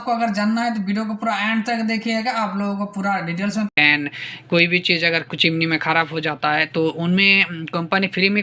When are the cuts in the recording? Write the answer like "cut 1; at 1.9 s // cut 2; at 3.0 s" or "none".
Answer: cut 1; at 3.7 s